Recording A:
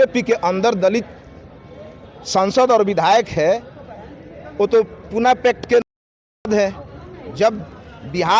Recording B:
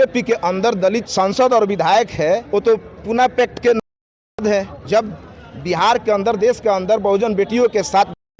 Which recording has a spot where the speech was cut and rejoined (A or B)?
B